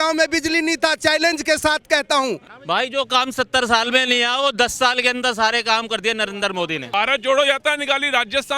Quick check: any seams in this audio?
yes; 2 cuts; at 2.5 s, 6.9 s

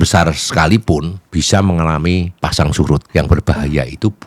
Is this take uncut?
no; 3 cuts; at 1.2 s, 2.3 s, 3.0 s

